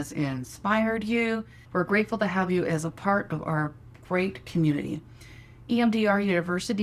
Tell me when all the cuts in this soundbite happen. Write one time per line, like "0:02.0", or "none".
0:01.6